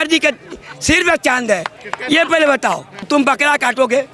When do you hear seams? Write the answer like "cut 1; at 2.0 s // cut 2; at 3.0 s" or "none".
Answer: cut 1; at 2.9 s